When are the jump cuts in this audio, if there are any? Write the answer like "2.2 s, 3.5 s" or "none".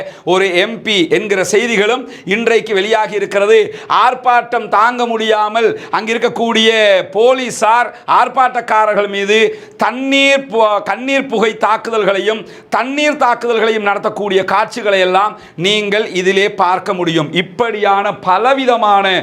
none